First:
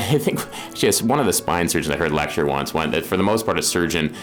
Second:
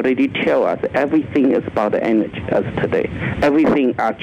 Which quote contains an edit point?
second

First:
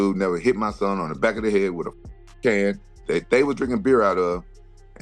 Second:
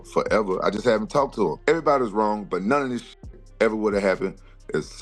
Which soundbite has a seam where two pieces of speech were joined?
second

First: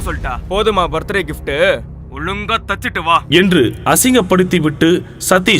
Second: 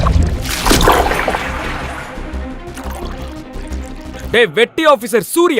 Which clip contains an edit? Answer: second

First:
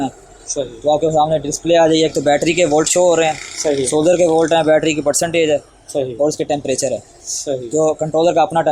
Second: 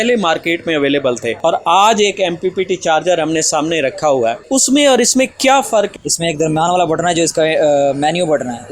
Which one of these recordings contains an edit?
second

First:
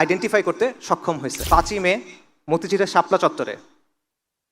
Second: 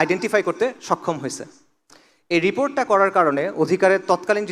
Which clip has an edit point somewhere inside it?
first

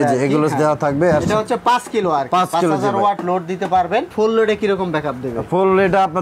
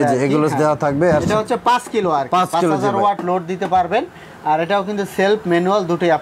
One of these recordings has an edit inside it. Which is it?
first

